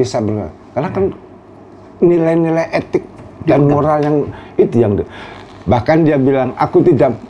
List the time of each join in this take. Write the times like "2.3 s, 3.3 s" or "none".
none

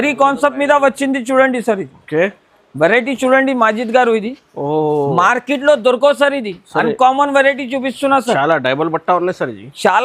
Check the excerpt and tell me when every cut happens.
none

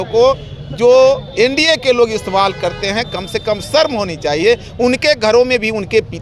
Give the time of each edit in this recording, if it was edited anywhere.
none

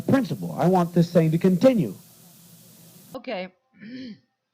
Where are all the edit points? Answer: 3.0 s

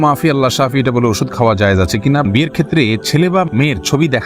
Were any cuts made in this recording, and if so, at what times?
2.2 s

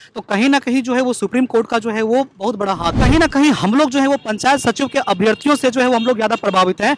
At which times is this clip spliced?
3.0 s

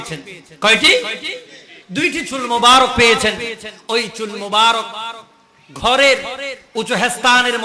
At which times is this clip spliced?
none

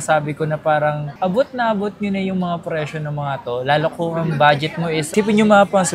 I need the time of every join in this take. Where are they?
1.1 s, 5.1 s

